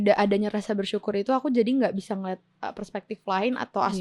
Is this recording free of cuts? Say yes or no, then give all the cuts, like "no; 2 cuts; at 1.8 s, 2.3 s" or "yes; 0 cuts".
yes; 0 cuts